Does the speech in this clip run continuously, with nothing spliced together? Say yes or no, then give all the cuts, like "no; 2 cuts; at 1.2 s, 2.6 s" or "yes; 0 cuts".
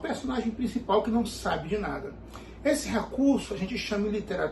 yes; 0 cuts